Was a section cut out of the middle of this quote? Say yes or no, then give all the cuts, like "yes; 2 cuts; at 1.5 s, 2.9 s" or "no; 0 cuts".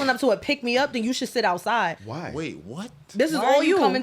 yes; 1 cut; at 2.0 s